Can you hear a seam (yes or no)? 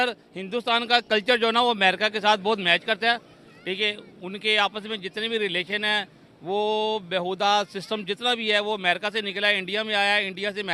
no